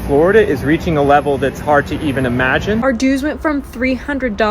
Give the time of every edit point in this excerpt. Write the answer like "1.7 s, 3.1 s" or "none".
2.8 s